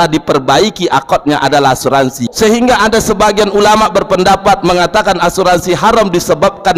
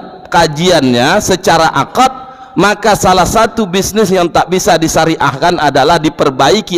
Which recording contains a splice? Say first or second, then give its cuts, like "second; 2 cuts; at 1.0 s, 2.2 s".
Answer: first; 1 cut; at 2.2 s